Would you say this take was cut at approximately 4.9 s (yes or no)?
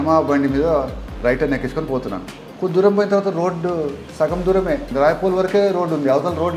yes